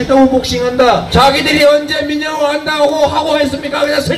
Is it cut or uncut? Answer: cut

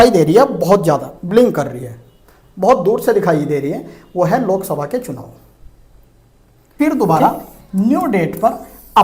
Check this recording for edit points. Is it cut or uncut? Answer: cut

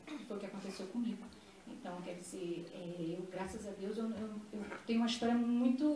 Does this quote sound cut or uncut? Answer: uncut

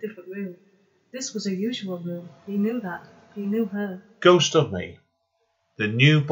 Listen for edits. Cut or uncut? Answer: uncut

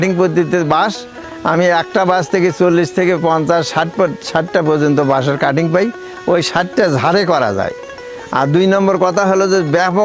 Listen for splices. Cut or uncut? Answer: uncut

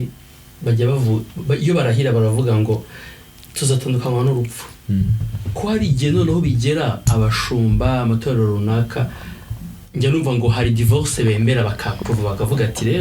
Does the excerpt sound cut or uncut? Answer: uncut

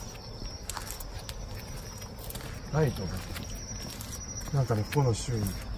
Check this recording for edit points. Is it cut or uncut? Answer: uncut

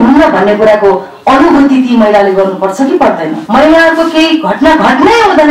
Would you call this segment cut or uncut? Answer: cut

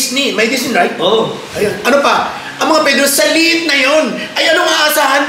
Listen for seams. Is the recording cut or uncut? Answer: uncut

